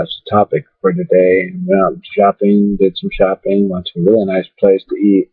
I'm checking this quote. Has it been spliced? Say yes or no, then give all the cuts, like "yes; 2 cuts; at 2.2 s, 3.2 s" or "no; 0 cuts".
yes; 1 cut; at 3.4 s